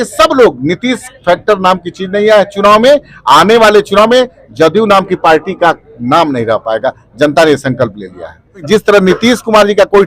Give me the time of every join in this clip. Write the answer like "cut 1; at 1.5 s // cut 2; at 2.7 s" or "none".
cut 1; at 8.6 s